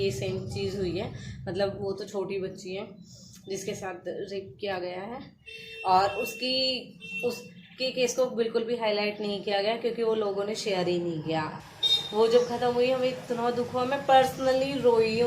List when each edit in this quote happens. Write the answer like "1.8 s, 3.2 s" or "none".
11.6 s